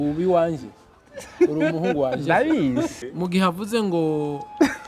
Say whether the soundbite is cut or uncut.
cut